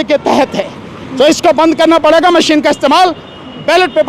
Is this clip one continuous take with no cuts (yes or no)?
yes